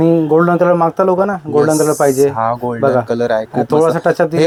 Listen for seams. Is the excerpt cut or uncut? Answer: uncut